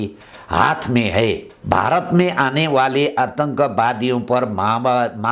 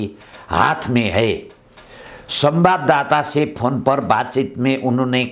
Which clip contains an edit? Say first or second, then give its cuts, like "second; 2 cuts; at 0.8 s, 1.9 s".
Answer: first; 1 cut; at 1.5 s